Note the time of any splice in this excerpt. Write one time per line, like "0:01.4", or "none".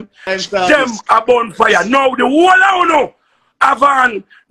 none

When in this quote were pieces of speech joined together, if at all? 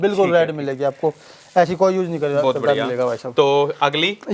none

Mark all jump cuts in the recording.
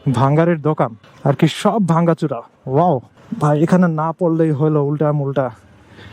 0:01.0
0:03.2

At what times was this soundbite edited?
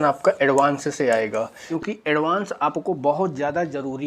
0:01.7

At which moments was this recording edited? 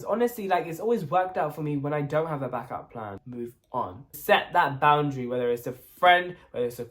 0:03.7

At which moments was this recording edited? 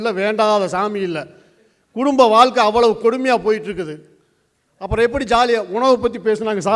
none

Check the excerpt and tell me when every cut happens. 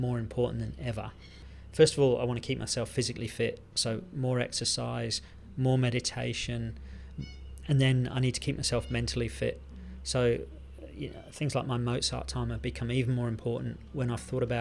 0:01.5

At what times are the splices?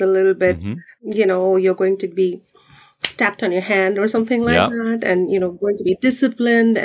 none

